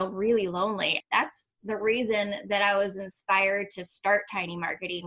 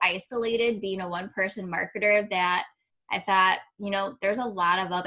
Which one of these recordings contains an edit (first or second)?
first